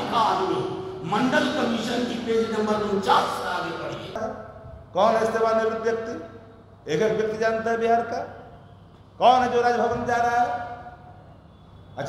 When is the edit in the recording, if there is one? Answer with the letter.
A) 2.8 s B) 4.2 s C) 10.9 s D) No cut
B